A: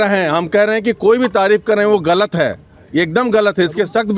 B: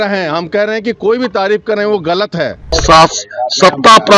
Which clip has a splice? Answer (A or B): B